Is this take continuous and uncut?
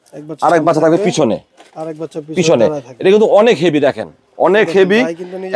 yes; 0 cuts

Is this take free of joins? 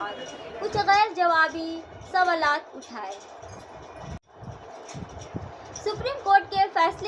no; 1 cut; at 4.3 s

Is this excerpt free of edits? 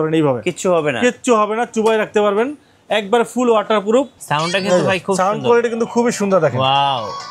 no; 1 cut; at 4.2 s

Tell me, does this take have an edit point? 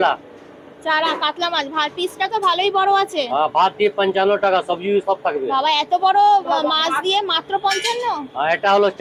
no; 0 cuts

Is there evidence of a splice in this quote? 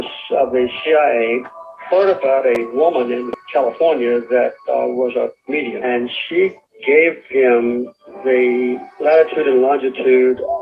yes; 1 cut; at 5.8 s

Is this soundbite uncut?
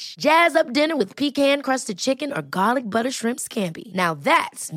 yes; 0 cuts

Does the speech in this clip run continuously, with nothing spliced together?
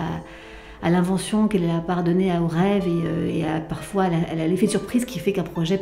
yes; 0 cuts

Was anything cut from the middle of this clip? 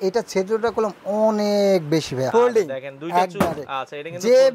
yes; 1 cut; at 2.3 s

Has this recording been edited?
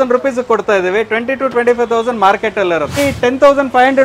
yes; 1 cut; at 3.0 s

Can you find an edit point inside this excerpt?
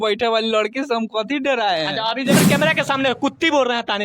yes; 1 cut; at 2.4 s

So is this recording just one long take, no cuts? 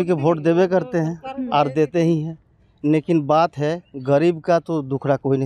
yes; 0 cuts

